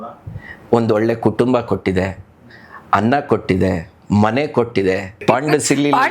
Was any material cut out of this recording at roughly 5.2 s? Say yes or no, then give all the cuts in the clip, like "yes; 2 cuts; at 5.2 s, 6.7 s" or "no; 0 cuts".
yes; 1 cut; at 5.2 s